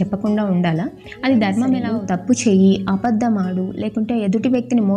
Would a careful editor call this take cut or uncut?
cut